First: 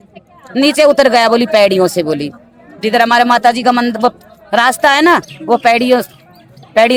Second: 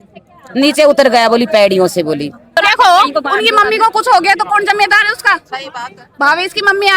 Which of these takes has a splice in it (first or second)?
second